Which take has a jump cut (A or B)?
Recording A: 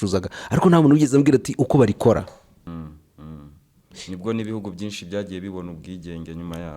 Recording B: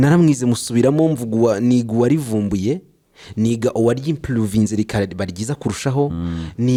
A